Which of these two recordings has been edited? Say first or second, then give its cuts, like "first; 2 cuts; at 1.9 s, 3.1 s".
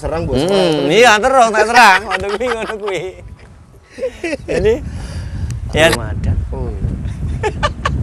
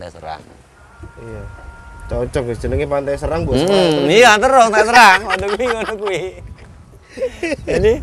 first; 1 cut; at 5.9 s